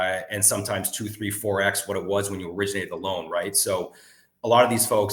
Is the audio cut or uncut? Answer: uncut